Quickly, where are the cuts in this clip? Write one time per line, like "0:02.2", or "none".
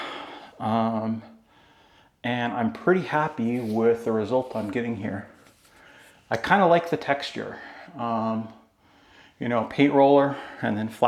none